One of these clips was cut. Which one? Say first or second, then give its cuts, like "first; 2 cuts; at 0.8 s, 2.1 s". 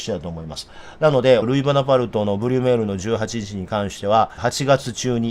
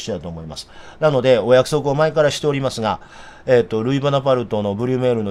first; 2 cuts; at 1.4 s, 4.4 s